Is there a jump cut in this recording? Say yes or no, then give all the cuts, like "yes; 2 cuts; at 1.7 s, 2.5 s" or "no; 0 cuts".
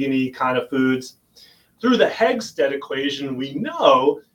yes; 1 cut; at 1.7 s